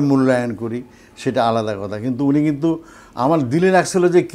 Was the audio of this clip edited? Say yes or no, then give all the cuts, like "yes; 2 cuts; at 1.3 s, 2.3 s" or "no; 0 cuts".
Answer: no; 0 cuts